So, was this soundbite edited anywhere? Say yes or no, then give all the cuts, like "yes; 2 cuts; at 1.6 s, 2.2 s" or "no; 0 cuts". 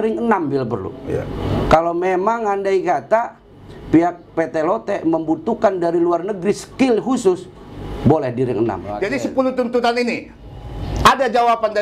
yes; 1 cut; at 8.9 s